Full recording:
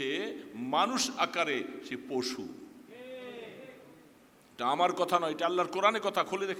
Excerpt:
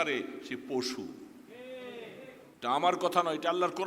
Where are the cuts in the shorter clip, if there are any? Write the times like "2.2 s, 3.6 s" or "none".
2.4 s